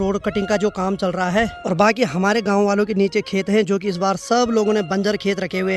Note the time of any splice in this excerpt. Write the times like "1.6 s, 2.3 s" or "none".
1.6 s